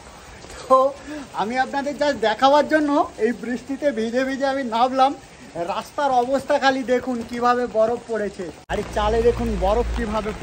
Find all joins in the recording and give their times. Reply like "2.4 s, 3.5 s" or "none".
8.6 s

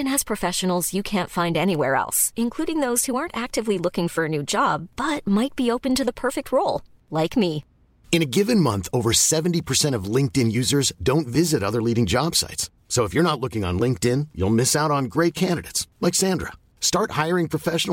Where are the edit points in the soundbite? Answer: none

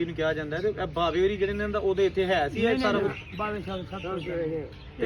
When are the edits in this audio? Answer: none

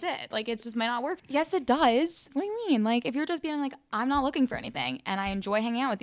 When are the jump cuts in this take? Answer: 1.2 s

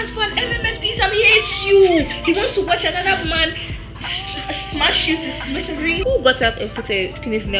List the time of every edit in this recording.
6.0 s

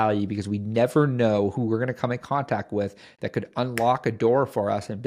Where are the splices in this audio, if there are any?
none

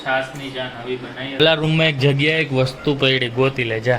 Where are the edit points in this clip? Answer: 1.4 s

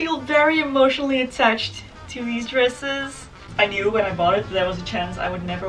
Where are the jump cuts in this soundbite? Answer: 3.5 s

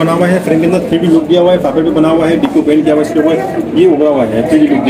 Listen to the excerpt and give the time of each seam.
none

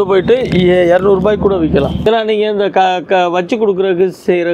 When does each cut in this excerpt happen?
2.1 s

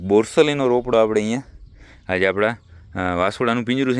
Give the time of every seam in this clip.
none

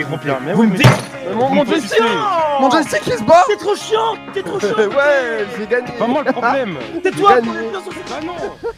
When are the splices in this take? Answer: none

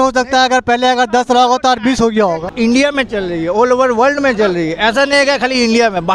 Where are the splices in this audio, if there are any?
2.5 s

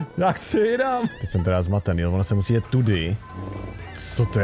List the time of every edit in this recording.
1.2 s

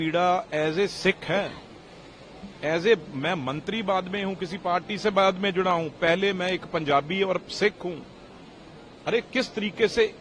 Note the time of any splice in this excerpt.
none

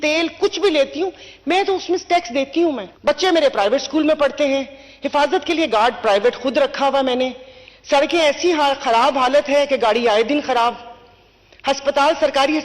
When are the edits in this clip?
2.9 s

